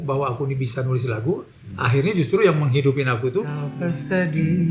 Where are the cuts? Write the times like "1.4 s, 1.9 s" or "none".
3.6 s